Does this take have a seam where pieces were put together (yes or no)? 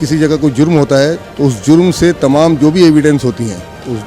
yes